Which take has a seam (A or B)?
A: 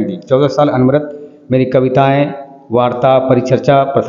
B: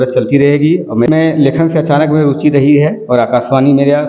B